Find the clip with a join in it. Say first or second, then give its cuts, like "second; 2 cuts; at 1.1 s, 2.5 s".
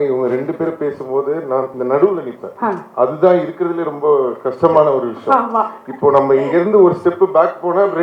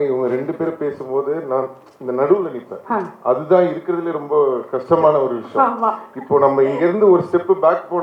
first; 1 cut; at 1.7 s